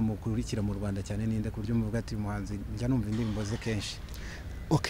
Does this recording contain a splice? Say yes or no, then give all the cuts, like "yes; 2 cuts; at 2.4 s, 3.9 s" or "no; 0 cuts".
no; 0 cuts